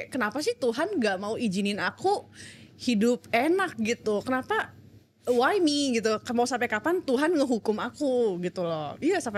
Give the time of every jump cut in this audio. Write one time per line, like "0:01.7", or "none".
none